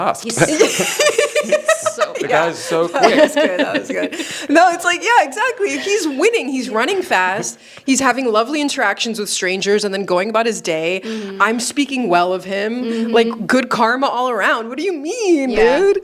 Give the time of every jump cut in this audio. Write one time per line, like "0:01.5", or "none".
none